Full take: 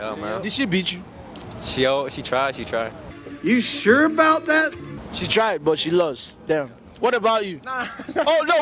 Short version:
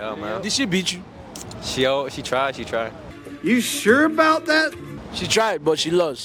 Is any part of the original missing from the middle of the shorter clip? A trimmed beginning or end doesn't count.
no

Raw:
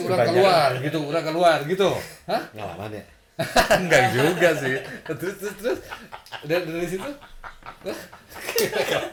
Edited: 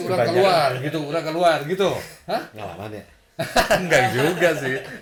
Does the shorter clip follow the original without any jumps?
yes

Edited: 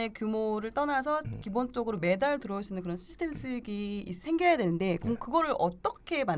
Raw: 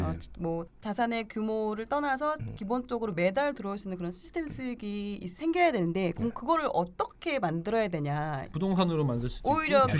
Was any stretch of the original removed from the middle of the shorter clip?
no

